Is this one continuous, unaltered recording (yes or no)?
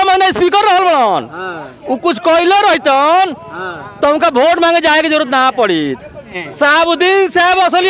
no